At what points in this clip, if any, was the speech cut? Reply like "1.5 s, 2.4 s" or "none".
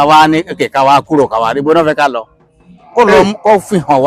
none